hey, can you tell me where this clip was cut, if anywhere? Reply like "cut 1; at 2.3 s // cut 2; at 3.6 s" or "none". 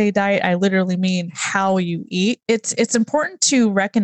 cut 1; at 2.4 s